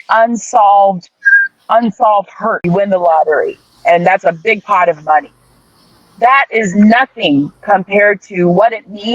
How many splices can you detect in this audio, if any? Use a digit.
1